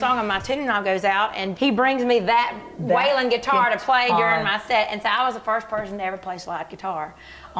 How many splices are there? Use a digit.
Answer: 0